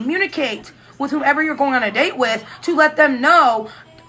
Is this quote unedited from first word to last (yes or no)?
yes